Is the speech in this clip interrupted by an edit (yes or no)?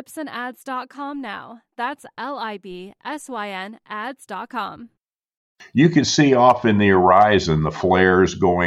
yes